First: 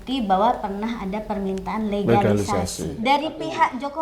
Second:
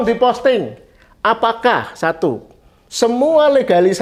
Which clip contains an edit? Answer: first; 1 cut; at 2.8 s

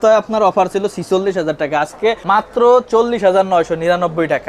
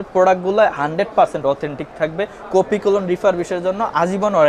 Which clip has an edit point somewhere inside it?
first; 1 cut; at 2.2 s

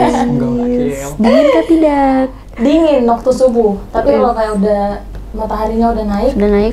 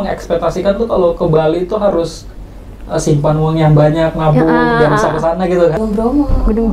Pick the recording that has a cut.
second; 1 cut; at 5.8 s

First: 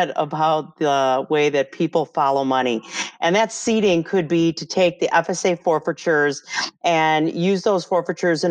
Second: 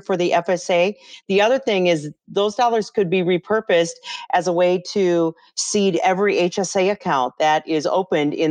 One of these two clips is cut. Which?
second; 1 cut; at 1.1 s

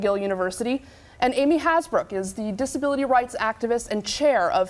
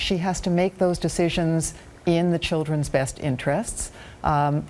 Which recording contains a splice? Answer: first; 1 cut; at 2.5 s

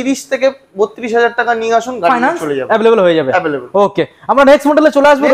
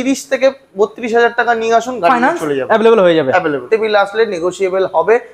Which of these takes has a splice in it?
second; 1 cut; at 3.6 s

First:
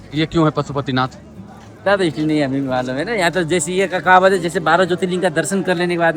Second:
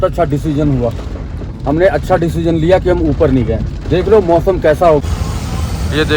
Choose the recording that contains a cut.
second; 1 cut; at 5.0 s

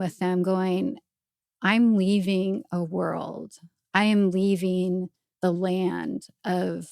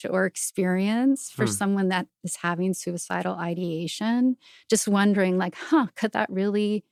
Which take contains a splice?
first; 1 cut; at 5.2 s

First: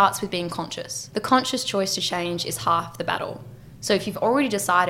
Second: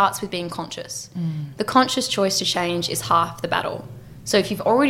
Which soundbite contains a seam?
first; 1 cut; at 1.0 s

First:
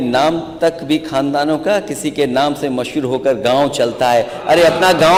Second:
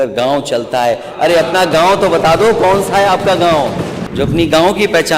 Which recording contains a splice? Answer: second; 1 cut; at 4.0 s

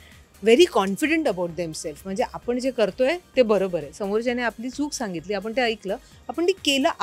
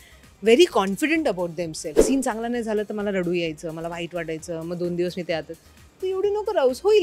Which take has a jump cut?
second; 1 cut; at 2.0 s

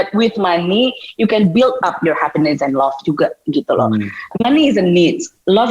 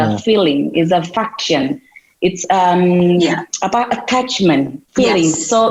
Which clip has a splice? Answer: first; 1 cut; at 4.3 s

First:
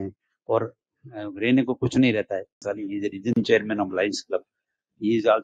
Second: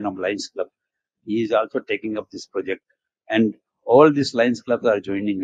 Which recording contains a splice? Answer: first; 1 cut; at 2.6 s

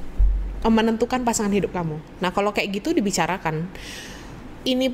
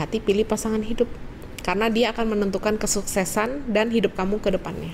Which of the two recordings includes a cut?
first; 1 cut; at 2.0 s

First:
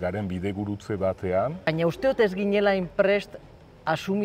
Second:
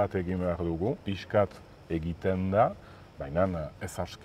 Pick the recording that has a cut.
first; 1 cut; at 1.7 s

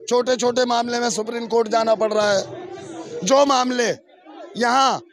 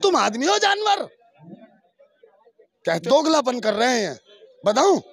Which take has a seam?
second; 1 cut; at 3.0 s

